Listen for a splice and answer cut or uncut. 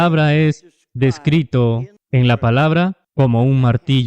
cut